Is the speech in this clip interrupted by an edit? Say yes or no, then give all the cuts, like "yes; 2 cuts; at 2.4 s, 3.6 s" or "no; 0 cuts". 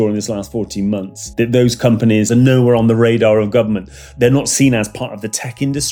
yes; 3 cuts; at 1.2 s, 2.3 s, 4.1 s